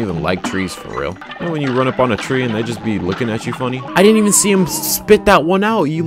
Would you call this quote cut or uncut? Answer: cut